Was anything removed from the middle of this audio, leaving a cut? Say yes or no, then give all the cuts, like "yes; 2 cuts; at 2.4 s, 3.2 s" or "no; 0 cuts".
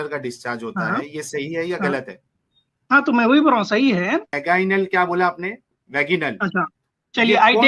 yes; 1 cut; at 4.3 s